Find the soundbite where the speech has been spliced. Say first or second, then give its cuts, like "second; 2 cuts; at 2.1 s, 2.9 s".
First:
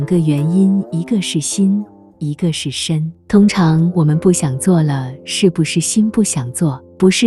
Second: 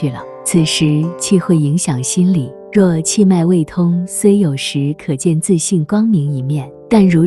second; 1 cut; at 2.6 s